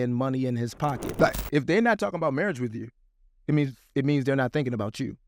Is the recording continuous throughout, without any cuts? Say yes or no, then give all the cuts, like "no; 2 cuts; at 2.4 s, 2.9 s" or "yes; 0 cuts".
no; 1 cut; at 1.1 s